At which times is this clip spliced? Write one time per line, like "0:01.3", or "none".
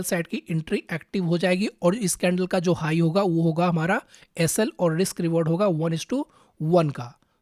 none